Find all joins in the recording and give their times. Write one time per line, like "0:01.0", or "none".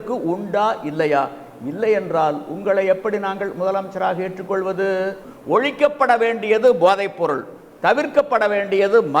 0:05.3